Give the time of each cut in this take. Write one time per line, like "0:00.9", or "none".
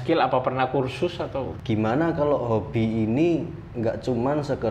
0:01.5